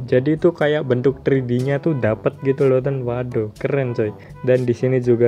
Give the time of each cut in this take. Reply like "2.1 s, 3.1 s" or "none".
4.3 s